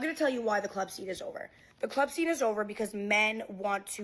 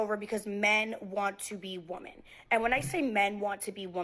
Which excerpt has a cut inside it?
first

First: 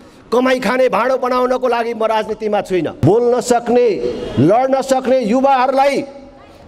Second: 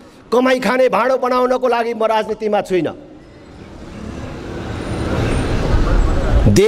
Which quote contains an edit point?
first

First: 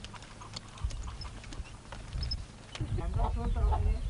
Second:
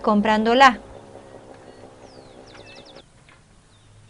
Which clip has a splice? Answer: first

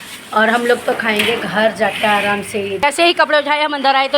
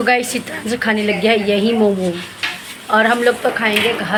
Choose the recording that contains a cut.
first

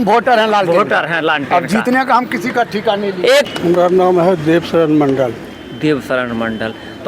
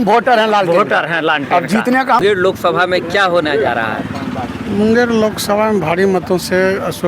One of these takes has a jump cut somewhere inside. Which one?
second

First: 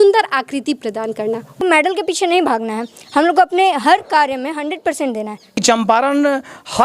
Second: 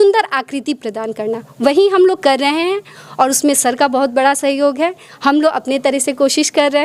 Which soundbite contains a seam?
first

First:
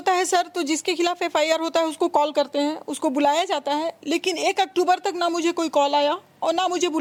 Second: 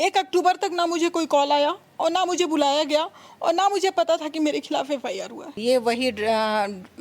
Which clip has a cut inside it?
second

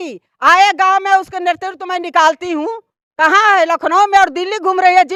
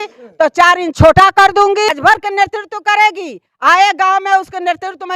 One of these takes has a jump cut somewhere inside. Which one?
second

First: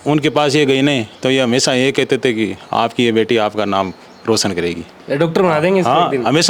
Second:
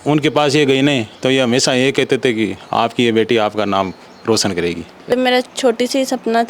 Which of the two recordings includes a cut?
second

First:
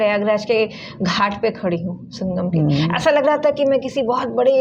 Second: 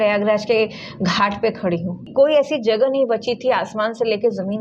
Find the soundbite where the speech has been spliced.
second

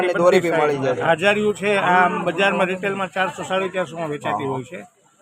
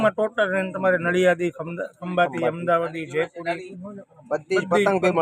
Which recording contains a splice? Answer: first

